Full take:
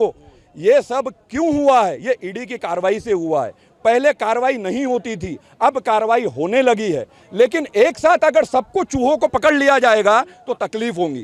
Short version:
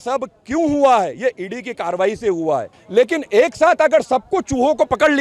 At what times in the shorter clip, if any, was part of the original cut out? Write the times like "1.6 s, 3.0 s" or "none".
2.8 s